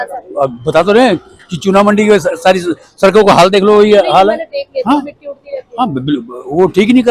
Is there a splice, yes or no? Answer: no